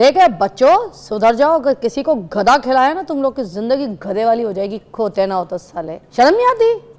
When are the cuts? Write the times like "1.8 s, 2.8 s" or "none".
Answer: 6.0 s

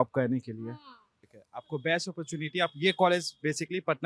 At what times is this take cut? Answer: 1.1 s

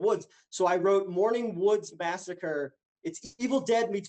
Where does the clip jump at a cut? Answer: 2.9 s

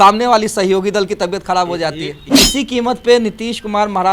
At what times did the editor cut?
2.3 s

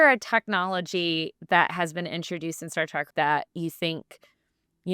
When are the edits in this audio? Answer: 3.1 s

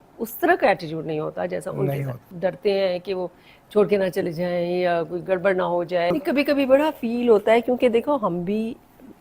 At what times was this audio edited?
2.2 s, 6.1 s

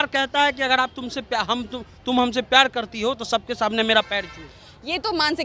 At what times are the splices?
none

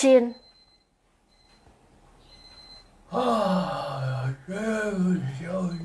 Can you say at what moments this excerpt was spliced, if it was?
none

